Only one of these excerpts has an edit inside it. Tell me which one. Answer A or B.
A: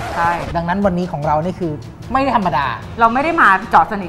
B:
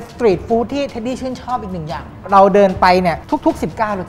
B